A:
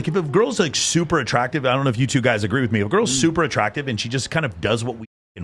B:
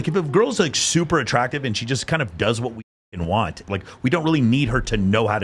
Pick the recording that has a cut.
B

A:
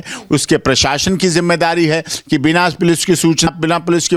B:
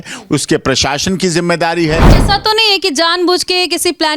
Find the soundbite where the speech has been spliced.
B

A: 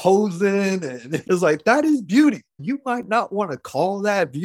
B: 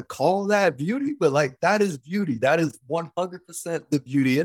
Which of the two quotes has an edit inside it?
A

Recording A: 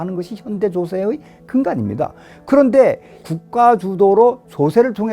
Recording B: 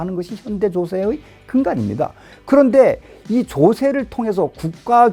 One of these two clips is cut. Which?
A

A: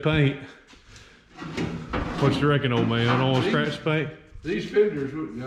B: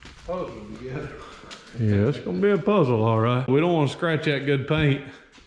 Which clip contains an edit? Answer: B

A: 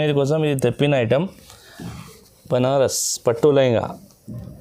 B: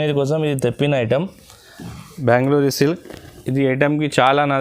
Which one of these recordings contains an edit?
B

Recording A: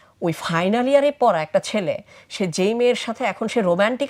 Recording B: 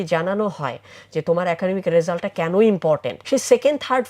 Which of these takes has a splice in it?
B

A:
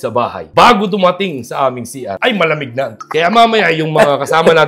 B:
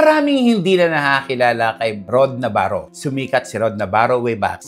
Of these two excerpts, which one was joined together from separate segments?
A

